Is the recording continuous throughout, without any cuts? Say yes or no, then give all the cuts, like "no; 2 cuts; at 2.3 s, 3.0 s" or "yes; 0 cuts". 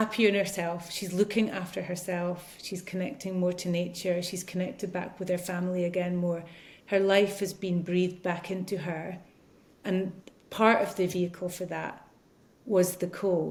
yes; 0 cuts